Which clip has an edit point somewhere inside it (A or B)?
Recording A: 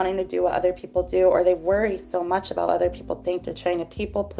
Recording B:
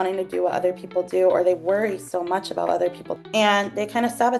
B